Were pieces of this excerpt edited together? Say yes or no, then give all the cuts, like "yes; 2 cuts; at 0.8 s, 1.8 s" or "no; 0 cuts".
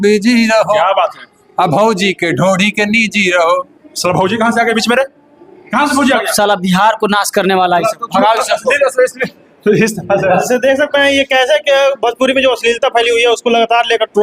no; 0 cuts